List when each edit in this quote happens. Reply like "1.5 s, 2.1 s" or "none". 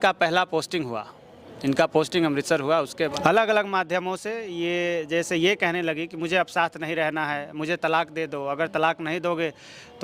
3.2 s